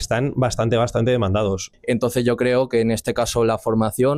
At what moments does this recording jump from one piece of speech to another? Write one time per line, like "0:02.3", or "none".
0:01.7